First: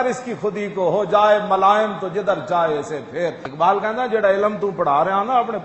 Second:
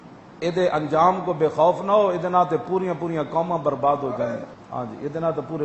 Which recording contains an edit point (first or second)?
first